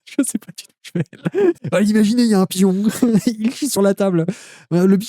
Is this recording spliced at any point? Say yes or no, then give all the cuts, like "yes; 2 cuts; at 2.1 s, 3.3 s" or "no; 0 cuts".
yes; 1 cut; at 1.6 s